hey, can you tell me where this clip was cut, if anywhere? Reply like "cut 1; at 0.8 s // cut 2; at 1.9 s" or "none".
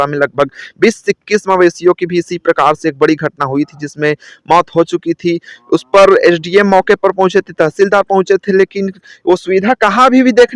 none